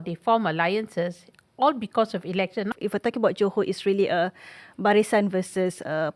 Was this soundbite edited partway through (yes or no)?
yes